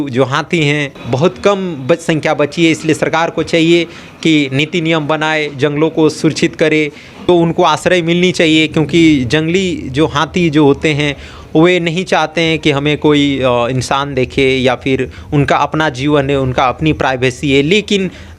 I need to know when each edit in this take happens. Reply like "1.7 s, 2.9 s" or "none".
0.9 s, 7.3 s